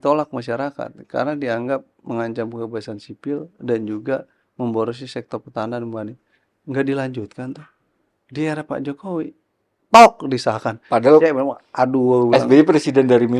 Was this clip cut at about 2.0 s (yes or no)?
no